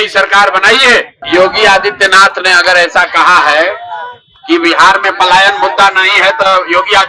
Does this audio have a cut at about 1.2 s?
yes; 1 cut; at 1.2 s

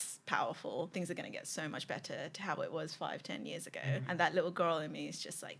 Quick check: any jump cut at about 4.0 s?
yes; 2 cuts; at 0.9 s, 4.0 s

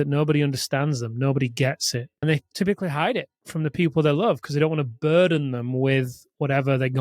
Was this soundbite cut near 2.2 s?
yes; 1 cut; at 2.2 s

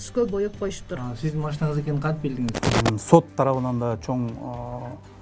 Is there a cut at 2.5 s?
yes; 1 cut; at 2.5 s

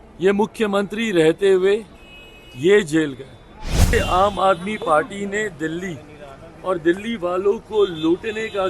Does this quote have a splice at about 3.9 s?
yes; 1 cut; at 3.9 s

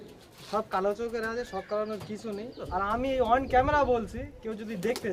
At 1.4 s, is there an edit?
no; 1 cut; at 2.7 s

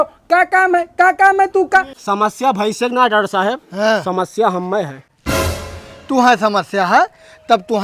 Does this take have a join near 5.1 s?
no; 1 cut; at 1.9 s

